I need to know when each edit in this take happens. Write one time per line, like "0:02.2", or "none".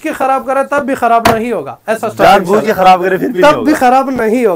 none